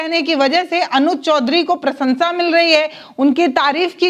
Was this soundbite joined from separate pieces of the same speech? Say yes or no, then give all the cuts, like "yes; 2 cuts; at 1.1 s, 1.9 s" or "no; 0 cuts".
no; 0 cuts